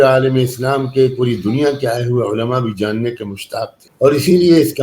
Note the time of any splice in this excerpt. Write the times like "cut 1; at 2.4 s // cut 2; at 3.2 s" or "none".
cut 1; at 3.8 s